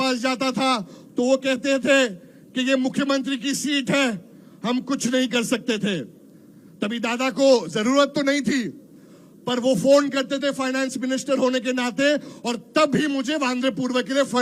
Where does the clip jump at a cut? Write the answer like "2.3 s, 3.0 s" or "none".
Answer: none